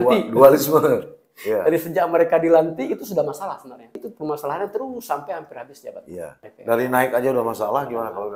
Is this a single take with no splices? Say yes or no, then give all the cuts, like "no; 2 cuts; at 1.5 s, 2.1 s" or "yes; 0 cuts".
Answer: no; 2 cuts; at 4.0 s, 6.5 s